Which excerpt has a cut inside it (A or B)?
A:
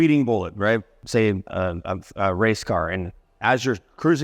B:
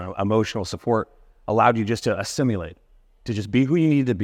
A